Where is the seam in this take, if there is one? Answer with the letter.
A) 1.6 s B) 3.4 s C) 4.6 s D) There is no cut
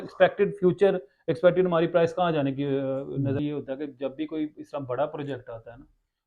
B